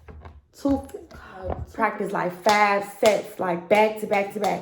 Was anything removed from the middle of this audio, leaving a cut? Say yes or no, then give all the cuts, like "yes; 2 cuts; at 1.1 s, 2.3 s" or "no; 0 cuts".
yes; 1 cut; at 1.6 s